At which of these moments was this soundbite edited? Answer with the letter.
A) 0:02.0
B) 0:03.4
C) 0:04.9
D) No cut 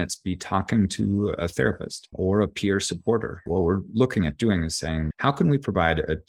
B